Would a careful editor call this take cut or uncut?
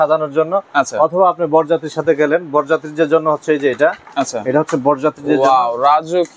uncut